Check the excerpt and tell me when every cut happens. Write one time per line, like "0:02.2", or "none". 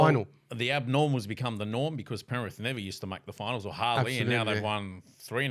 none